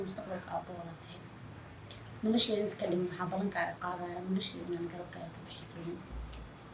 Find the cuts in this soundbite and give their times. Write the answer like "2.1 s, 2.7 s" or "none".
none